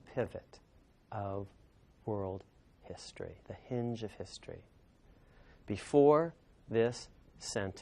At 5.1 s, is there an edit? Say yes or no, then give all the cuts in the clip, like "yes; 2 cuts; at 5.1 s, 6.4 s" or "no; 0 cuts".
no; 1 cut; at 1.8 s